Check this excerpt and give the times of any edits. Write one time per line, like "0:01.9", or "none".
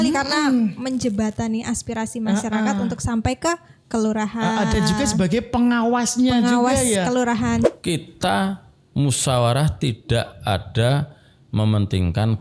0:07.7

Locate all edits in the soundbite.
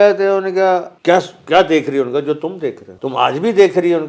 0:00.9
0:02.9

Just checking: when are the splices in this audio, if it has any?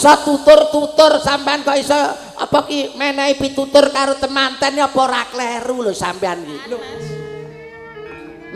0:06.6

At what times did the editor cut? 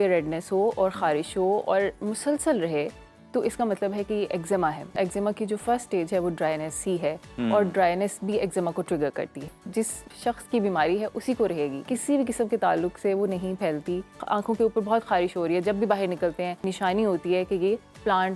0:04.9
0:09.9
0:11.8
0:14.2
0:16.7

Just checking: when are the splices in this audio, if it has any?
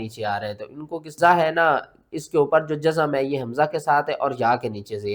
0:01.1

